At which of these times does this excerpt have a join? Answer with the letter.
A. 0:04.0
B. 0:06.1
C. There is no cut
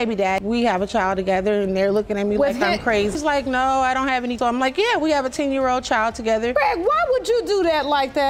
C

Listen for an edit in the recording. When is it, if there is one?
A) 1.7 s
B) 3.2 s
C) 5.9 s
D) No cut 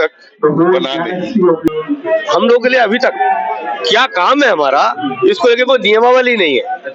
A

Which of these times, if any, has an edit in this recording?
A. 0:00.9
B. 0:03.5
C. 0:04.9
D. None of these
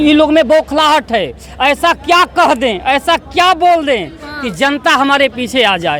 D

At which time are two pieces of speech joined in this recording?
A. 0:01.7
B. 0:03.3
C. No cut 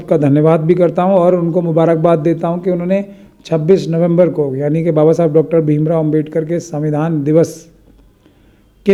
C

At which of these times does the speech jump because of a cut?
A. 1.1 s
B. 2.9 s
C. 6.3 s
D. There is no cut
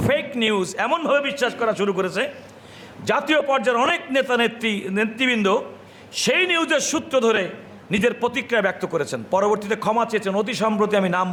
D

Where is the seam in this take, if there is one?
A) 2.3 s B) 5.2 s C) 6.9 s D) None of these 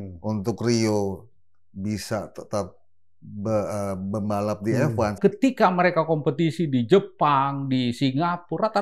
B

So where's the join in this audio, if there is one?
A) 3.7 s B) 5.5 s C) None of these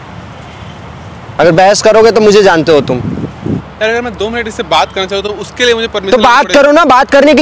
A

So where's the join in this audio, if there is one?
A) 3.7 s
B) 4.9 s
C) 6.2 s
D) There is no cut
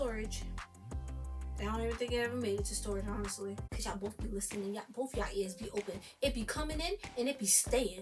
A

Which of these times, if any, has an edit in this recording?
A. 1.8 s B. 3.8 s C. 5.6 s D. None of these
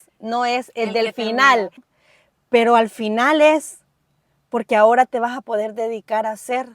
A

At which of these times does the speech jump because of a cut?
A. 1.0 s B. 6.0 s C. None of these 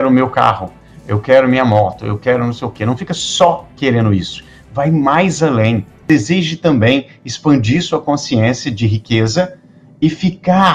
B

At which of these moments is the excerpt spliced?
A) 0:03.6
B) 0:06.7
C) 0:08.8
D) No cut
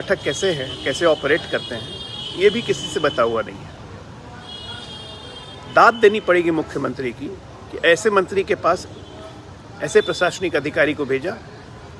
D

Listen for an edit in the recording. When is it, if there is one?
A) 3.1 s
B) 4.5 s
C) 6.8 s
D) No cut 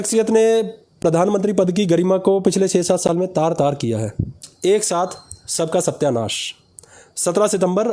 B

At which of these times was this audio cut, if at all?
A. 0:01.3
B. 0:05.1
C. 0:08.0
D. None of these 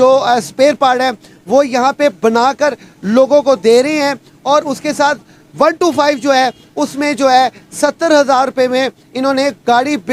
D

